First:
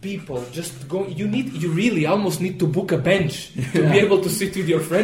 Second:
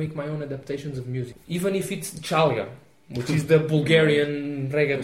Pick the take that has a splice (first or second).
second